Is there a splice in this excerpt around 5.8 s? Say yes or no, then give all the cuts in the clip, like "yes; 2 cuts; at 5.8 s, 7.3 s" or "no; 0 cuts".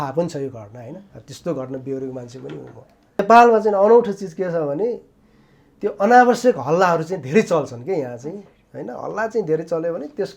no; 1 cut; at 3.2 s